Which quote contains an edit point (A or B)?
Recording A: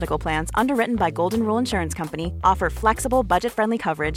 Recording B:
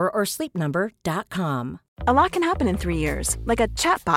B